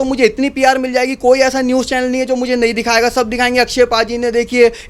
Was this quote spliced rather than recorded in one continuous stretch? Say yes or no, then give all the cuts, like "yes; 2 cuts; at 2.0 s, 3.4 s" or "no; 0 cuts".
no; 0 cuts